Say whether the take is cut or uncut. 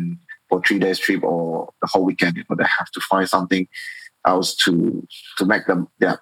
uncut